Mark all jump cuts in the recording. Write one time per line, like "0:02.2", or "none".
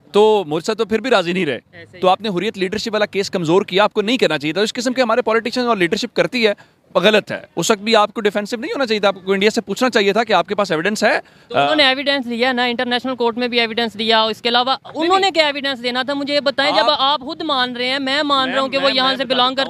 none